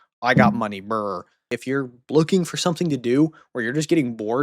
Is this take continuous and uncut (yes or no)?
no